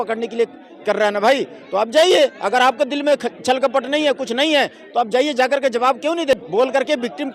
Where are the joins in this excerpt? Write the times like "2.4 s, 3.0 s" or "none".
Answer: 6.4 s